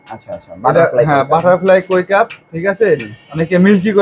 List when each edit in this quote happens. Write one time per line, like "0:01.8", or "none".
none